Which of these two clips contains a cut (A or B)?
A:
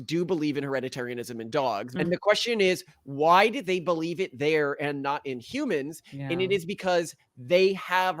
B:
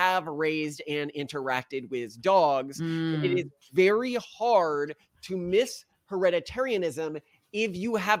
A